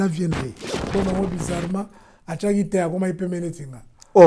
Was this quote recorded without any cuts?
no; 1 cut; at 0.9 s

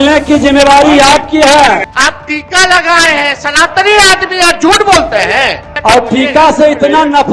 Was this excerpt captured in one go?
no; 2 cuts; at 1.9 s, 5.7 s

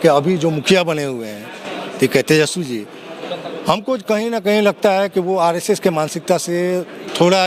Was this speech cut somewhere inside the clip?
no; 0 cuts

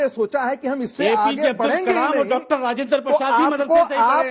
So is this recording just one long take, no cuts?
yes; 0 cuts

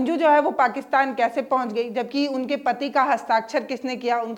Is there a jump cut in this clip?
no; 0 cuts

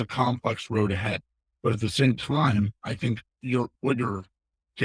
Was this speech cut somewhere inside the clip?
yes; 1 cut; at 3.7 s

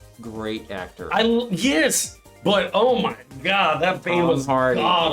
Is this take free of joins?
yes; 0 cuts

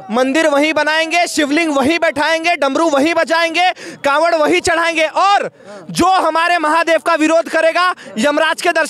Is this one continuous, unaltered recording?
yes; 0 cuts

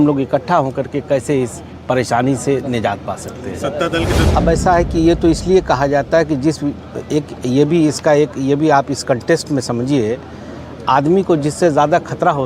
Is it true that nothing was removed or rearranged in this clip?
no; 1 cut; at 4.2 s

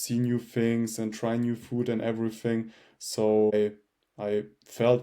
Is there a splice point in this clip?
yes; 1 cut; at 3.5 s

